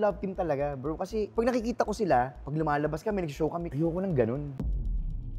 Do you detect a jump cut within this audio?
yes; 4 cuts; at 1.3 s, 2.4 s, 3.7 s, 4.5 s

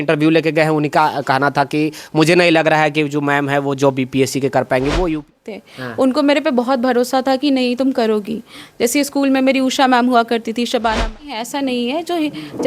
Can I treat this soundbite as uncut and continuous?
no; 2 cuts; at 5.3 s, 11.3 s

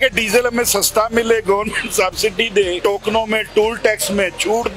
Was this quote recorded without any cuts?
no; 1 cut; at 2.8 s

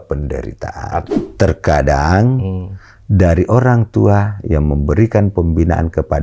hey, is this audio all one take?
no; 1 cut; at 1.0 s

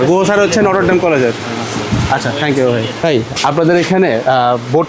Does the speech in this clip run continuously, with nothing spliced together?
no; 1 cut; at 3.0 s

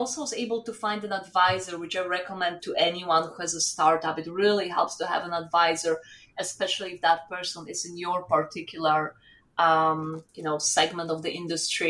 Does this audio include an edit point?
no; 0 cuts

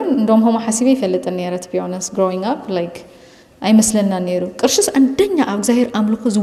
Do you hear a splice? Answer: no; 0 cuts

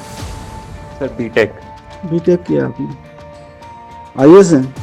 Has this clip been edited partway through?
no; 0 cuts

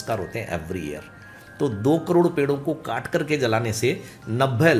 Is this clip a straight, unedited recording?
yes; 0 cuts

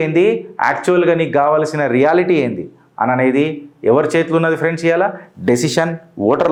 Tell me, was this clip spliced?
no; 0 cuts

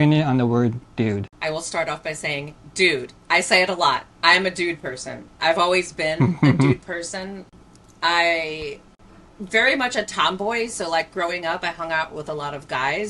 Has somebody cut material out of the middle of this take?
yes; 1 cut; at 1.3 s

